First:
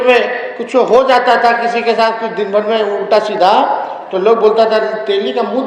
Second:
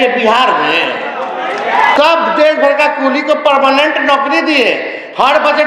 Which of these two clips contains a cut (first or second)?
second